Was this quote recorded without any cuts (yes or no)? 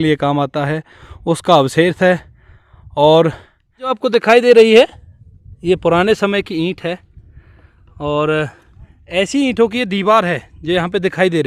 no